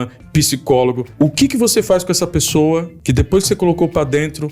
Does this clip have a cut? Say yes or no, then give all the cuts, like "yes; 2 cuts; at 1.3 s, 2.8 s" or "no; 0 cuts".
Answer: yes; 2 cuts; at 1.1 s, 3.0 s